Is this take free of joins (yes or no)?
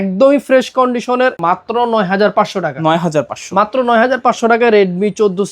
no